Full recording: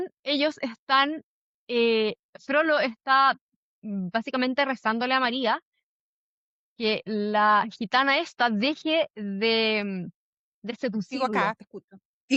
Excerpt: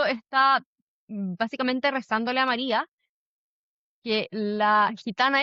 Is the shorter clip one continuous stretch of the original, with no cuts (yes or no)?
yes